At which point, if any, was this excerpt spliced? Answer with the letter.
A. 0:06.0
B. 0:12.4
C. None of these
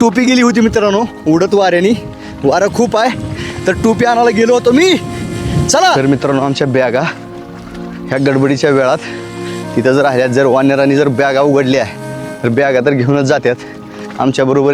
A